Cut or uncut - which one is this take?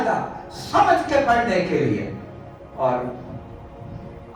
uncut